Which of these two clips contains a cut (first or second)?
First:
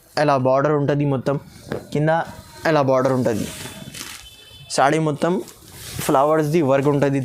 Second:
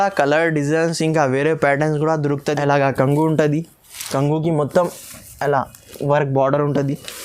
second